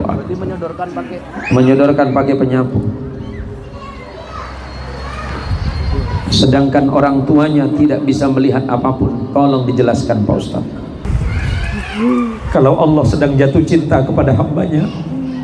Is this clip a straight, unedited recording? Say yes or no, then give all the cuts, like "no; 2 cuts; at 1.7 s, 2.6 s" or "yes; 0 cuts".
no; 1 cut; at 11.1 s